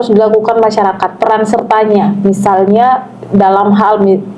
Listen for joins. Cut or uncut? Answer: uncut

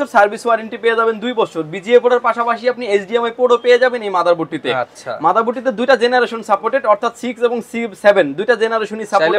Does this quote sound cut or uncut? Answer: uncut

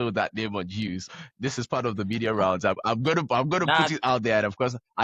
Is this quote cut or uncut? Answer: cut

